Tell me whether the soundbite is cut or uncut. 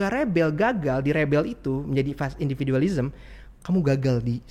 uncut